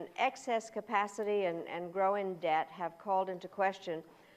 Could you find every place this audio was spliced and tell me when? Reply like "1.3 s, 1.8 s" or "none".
2.5 s